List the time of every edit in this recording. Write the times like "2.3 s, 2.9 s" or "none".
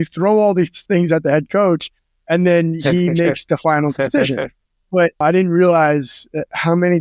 5.2 s